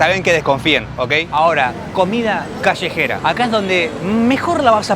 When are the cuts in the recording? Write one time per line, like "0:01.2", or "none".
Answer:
0:01.2